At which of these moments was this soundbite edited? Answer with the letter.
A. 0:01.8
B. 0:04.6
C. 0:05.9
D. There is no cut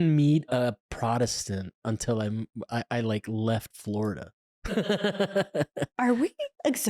C